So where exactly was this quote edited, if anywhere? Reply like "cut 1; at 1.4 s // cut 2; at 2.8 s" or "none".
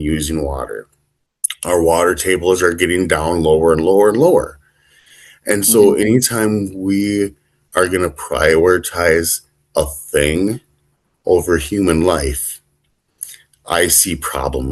none

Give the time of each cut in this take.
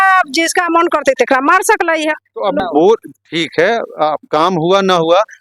cut 1; at 2.6 s

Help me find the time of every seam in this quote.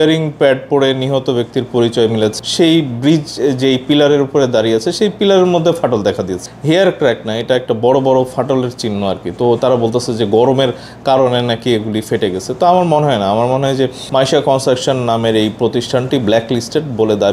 cut 1; at 2.3 s // cut 2; at 6.5 s // cut 3; at 14.0 s

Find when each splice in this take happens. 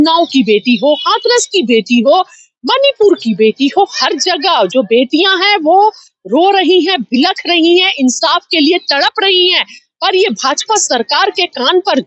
none

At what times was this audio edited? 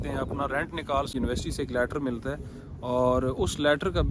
cut 1; at 1.1 s

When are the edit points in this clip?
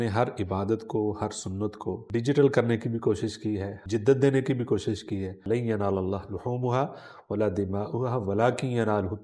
cut 1; at 2.0 s // cut 2; at 3.7 s // cut 3; at 5.4 s

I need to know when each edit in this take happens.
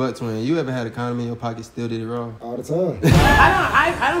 none

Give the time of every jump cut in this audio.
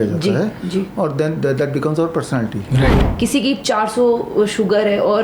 cut 1; at 3.0 s

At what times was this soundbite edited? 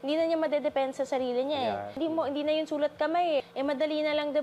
cut 1; at 2.0 s // cut 2; at 3.4 s

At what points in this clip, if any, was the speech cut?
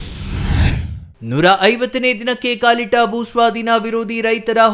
cut 1; at 1.0 s

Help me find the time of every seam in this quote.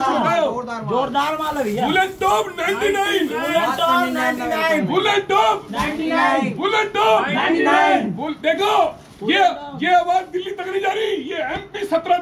none

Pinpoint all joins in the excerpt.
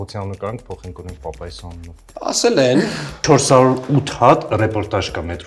cut 1; at 2.0 s // cut 2; at 3.2 s

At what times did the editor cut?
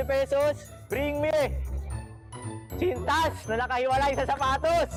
none

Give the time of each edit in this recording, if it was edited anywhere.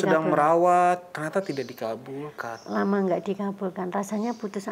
none

